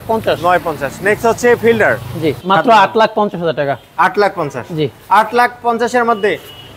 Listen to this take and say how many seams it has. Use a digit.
1